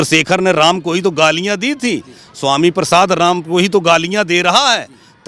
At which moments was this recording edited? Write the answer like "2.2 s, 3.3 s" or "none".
none